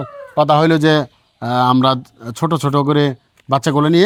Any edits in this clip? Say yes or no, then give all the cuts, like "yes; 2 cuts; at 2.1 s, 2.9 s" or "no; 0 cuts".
no; 0 cuts